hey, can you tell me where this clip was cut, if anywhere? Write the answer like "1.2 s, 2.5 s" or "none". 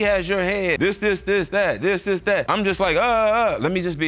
0.8 s, 2.5 s